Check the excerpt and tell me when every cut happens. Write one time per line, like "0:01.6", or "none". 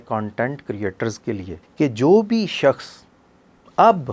0:01.6

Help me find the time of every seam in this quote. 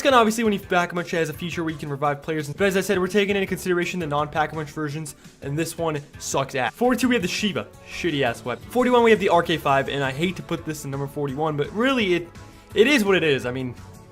0:10.6

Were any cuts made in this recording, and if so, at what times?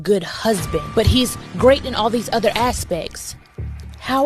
0:01.4

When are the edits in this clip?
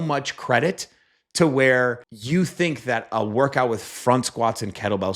0:02.1

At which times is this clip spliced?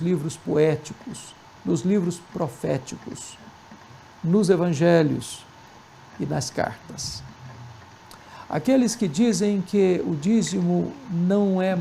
0:10.7

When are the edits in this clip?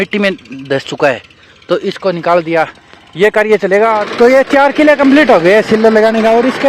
0:04.0

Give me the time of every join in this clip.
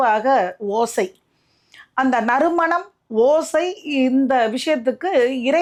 none

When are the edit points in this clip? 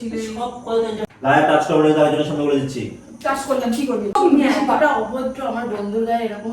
0:01.0
0:04.1

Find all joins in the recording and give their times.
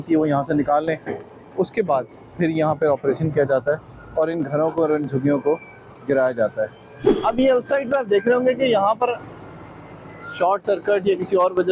none

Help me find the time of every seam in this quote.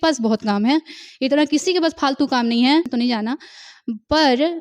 0:02.9

